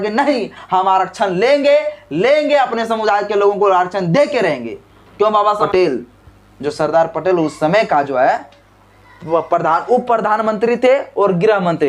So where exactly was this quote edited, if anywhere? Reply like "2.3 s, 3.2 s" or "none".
5.5 s